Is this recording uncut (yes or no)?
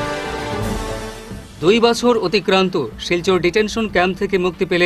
yes